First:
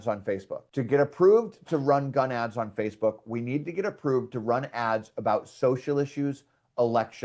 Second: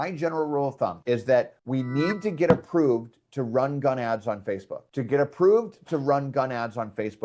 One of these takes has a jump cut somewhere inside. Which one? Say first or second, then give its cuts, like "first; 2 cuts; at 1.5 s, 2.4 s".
second; 2 cuts; at 1.0 s, 1.6 s